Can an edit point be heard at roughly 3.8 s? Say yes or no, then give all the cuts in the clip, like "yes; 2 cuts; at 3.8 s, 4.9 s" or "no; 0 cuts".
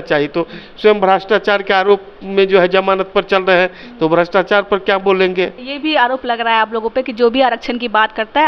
no; 1 cut; at 5.7 s